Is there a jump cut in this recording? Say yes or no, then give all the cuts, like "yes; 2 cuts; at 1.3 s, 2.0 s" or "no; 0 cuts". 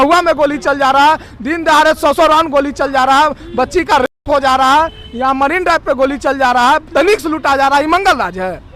no; 0 cuts